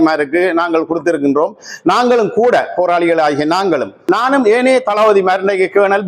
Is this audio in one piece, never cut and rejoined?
no; 1 cut; at 4.0 s

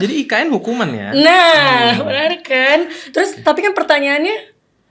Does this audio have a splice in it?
no; 0 cuts

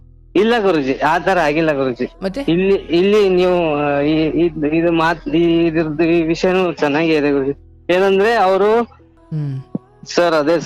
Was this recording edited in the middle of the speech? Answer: yes; 1 cut; at 9.0 s

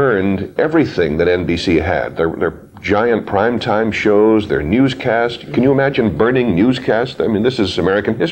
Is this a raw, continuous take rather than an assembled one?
yes; 0 cuts

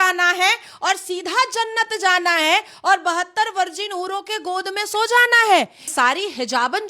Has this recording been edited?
yes; 1 cut; at 5.8 s

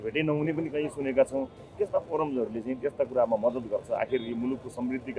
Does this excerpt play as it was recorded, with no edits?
yes; 0 cuts

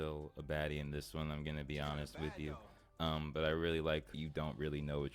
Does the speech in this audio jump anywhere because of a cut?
yes; 1 cut; at 4.1 s

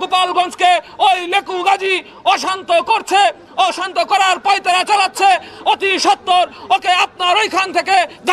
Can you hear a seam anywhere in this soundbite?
no; 0 cuts

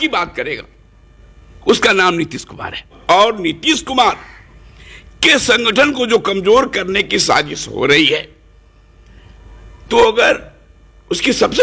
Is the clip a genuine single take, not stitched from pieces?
yes; 0 cuts

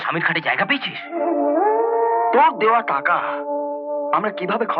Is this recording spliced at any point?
yes; 1 cut; at 2.2 s

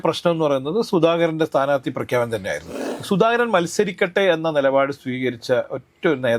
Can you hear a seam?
yes; 1 cut; at 2.9 s

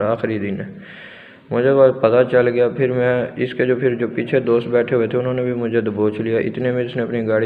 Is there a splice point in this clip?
no; 0 cuts

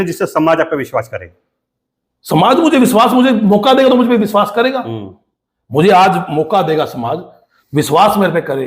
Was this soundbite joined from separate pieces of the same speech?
no; 0 cuts

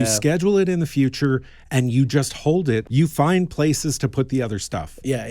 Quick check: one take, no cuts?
no; 1 cut; at 2.9 s

